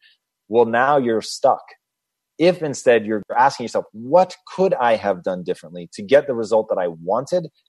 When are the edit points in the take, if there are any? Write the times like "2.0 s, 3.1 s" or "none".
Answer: 3.2 s